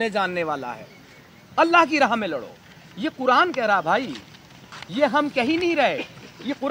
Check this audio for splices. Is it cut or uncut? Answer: uncut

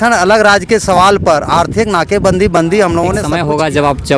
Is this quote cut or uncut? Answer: cut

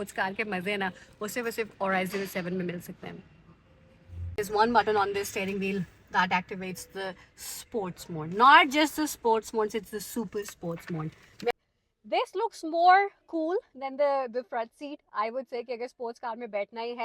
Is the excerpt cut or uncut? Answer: cut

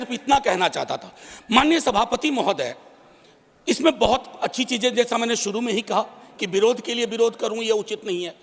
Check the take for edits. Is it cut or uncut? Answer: uncut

